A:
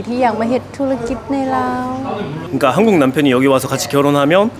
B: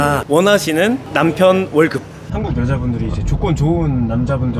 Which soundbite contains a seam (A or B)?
B